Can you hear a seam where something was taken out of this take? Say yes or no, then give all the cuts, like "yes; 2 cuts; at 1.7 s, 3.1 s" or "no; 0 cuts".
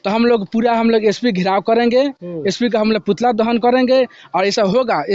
no; 0 cuts